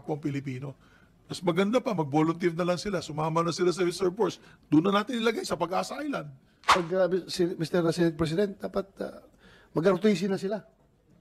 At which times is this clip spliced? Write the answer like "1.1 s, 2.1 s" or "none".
6.7 s

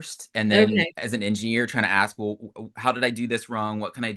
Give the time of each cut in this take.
none

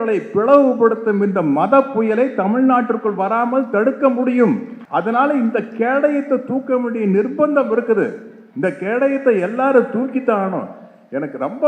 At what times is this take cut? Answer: 4.7 s

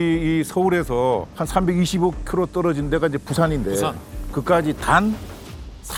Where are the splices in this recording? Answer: none

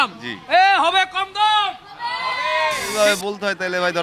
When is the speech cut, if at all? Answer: 2.8 s

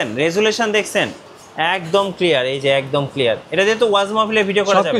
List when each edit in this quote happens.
none

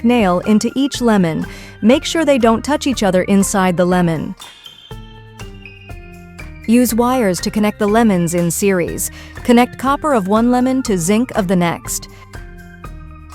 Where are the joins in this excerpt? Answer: 4.3 s, 5.9 s, 11.8 s

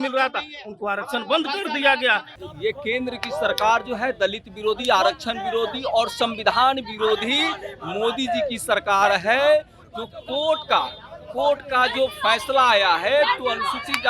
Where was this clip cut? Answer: 2.4 s

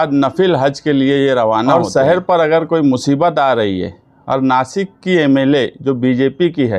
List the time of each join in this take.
1.7 s

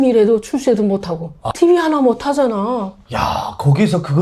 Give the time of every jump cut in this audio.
1.3 s

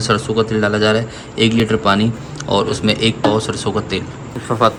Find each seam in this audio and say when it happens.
none

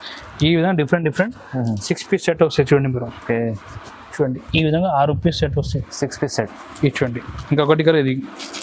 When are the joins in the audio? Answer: none

